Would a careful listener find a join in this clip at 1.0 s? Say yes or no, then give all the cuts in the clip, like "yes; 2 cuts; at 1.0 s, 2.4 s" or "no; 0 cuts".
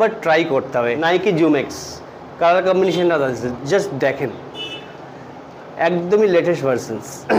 yes; 1 cut; at 1.0 s